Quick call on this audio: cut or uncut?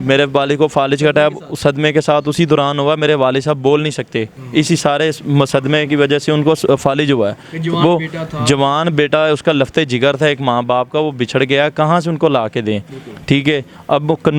cut